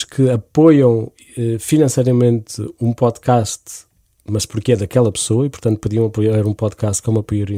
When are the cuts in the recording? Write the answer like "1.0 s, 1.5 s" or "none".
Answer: none